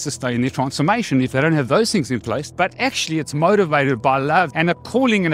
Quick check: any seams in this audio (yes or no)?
yes